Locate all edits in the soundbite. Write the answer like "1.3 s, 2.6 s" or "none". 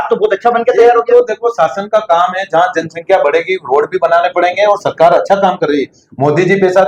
none